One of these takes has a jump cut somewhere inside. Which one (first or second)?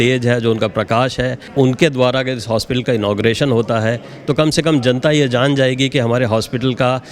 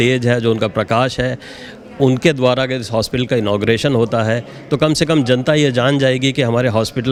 first